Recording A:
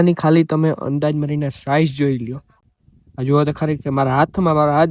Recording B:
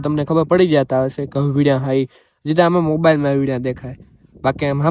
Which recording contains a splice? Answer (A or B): A